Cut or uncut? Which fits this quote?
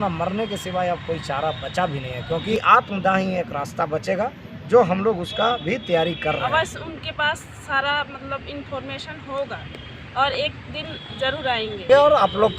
cut